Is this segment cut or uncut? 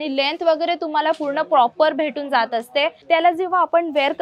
cut